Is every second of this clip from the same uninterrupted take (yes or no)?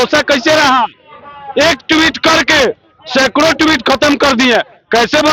yes